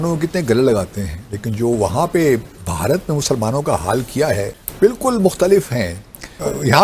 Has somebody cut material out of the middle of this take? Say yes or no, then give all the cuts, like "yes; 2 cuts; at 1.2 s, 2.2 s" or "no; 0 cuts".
no; 0 cuts